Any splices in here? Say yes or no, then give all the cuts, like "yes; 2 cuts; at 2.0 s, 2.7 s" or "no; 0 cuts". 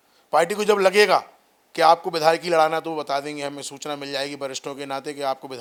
no; 0 cuts